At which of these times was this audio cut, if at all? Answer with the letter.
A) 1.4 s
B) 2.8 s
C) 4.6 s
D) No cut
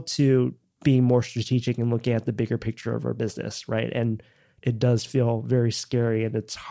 C